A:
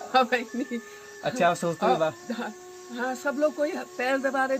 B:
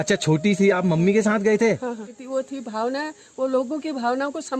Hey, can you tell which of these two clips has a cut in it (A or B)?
B